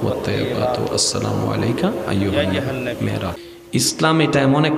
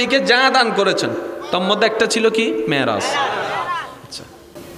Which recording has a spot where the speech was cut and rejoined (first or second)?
first